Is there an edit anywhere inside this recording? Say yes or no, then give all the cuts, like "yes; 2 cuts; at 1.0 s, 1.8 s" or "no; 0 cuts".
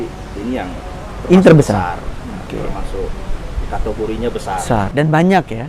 no; 0 cuts